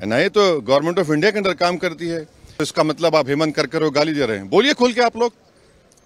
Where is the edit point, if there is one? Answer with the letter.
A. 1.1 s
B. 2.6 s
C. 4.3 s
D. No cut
B